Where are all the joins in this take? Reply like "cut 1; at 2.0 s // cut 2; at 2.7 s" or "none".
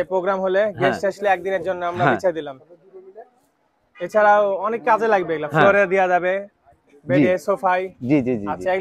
none

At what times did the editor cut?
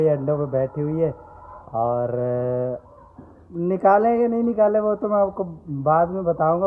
none

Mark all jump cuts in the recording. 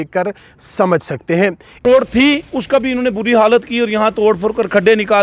cut 1; at 1.8 s

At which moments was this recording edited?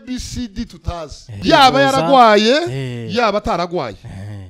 cut 1; at 1.3 s

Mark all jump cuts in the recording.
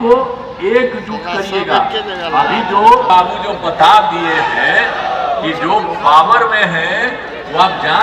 none

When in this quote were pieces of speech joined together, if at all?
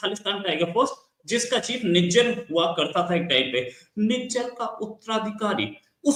none

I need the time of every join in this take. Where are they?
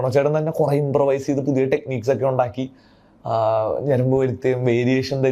none

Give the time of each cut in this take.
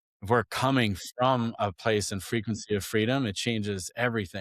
none

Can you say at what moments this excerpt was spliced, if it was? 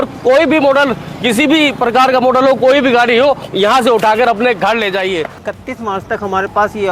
cut 1; at 5.4 s

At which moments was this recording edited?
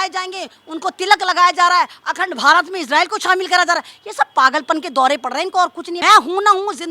cut 1; at 5.9 s

